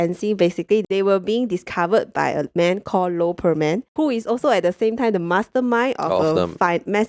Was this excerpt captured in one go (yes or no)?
yes